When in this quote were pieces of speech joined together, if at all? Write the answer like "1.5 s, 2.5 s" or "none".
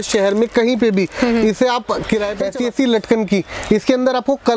2.4 s